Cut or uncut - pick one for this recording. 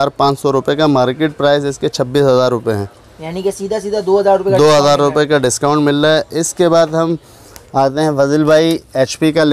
uncut